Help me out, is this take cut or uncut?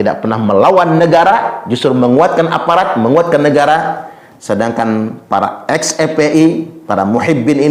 uncut